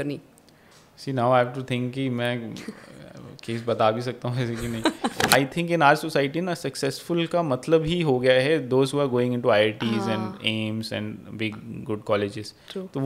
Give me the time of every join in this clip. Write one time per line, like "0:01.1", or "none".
0:05.3